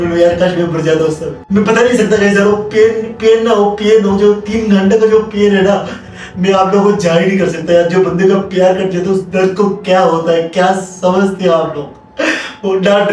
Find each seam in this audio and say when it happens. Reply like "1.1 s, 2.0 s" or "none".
1.3 s